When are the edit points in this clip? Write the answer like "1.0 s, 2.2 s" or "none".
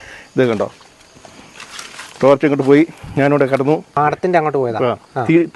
3.9 s